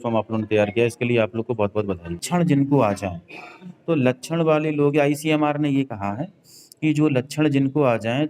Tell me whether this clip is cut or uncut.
cut